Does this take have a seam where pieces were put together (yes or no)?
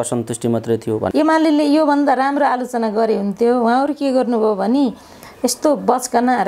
yes